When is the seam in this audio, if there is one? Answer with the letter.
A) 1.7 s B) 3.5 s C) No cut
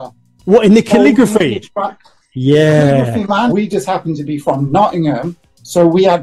B